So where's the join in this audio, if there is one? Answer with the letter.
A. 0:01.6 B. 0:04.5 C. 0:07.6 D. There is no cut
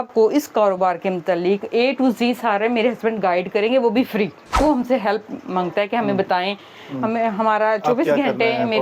B